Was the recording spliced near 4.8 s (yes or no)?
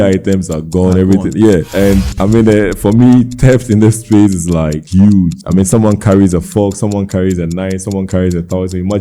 yes